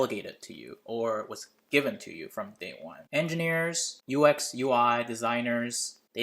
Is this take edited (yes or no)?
yes